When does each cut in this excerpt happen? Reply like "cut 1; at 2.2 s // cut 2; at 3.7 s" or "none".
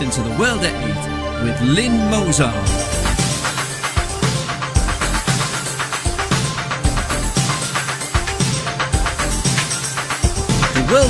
none